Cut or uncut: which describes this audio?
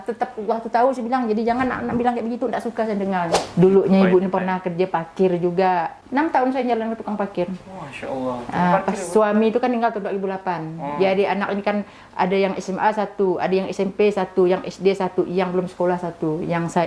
cut